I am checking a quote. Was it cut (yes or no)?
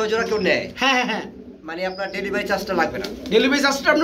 no